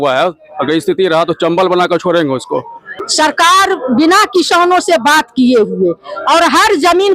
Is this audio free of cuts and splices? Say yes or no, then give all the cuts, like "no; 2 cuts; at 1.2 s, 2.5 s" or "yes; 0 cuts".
no; 1 cut; at 3.0 s